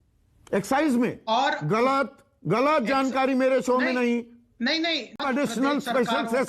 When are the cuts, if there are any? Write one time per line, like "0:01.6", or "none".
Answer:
0:05.2